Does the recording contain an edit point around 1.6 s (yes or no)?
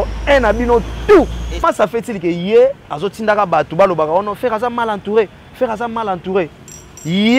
yes